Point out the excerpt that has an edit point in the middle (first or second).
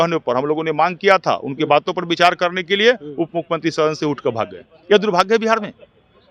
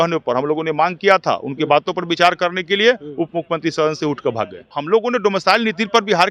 second